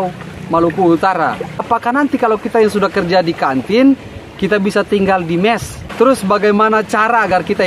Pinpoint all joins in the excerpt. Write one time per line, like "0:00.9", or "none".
0:01.6
0:05.8